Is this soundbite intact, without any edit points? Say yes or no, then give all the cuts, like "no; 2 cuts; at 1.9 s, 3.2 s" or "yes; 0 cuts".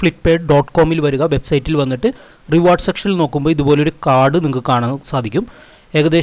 yes; 0 cuts